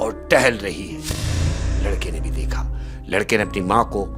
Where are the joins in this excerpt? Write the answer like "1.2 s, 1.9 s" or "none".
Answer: none